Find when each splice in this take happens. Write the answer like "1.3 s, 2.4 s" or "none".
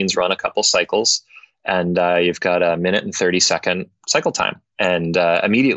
4.6 s